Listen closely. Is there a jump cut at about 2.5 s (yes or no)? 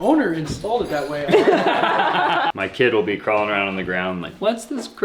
yes